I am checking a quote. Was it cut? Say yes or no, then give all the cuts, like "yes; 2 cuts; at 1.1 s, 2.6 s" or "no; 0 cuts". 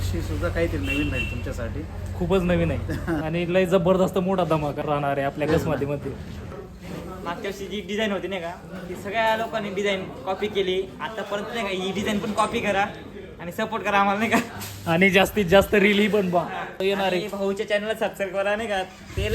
yes; 4 cuts; at 3.2 s, 4.8 s, 6.5 s, 16.8 s